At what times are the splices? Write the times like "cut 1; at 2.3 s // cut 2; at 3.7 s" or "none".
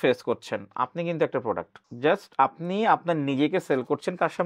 cut 1; at 1.8 s